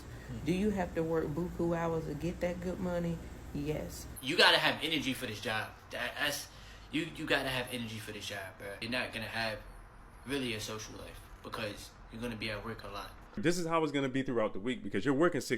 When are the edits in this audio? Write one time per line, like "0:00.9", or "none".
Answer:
0:04.1
0:08.8
0:13.4